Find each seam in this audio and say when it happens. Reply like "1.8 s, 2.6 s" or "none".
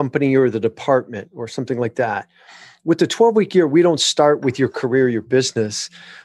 none